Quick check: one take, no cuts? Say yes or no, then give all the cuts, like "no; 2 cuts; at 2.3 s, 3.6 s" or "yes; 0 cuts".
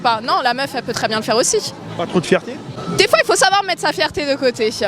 no; 1 cut; at 2.7 s